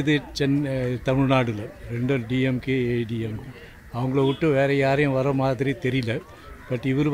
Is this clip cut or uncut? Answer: uncut